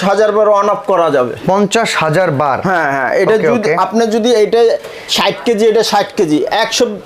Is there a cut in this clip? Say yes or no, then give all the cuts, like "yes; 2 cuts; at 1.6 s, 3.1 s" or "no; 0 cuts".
no; 0 cuts